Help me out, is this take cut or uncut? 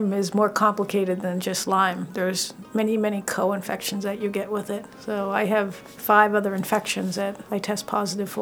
cut